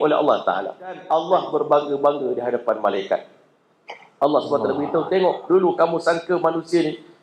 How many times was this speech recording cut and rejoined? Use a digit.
1